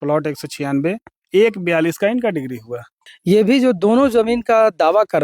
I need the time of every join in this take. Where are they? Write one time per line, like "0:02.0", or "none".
0:03.0